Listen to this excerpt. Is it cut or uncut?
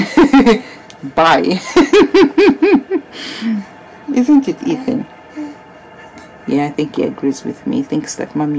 uncut